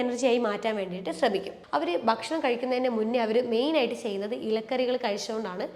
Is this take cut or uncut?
cut